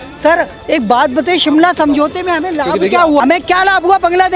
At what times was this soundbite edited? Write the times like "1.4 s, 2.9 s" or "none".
3.2 s